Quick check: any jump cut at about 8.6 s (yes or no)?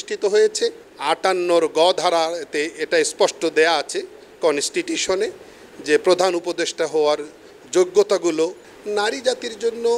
yes